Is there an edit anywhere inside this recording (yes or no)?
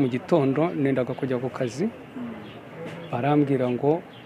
no